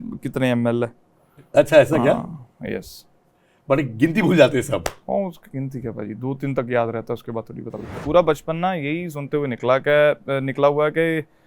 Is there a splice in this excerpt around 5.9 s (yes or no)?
no